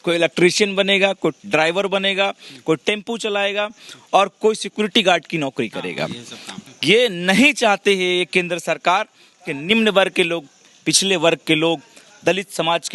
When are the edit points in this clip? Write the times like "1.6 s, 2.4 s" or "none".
6.5 s